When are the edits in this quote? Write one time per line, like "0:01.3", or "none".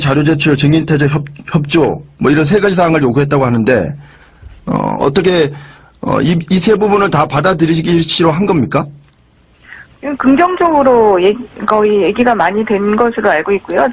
none